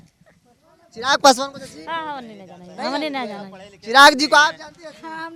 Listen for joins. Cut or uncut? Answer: uncut